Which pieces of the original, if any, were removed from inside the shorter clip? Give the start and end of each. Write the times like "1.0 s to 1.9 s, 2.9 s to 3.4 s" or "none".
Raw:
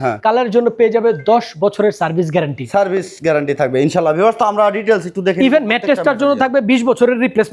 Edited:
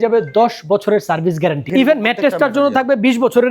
2.6 s to 5.4 s

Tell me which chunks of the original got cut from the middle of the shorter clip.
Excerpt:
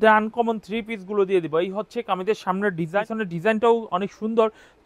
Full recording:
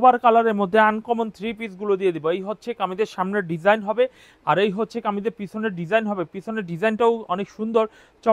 3.8 s to 6.4 s

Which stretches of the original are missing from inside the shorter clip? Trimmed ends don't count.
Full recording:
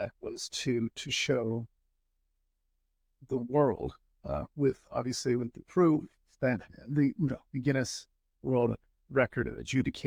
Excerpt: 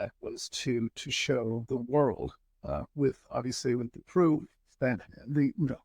1.6 s to 3.2 s

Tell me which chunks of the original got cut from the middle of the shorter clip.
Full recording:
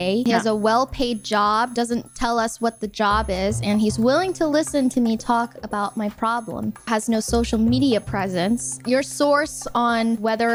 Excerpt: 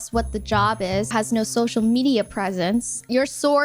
3.6 s to 6.8 s

